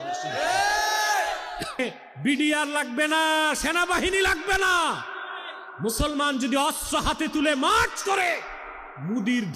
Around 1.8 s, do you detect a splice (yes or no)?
yes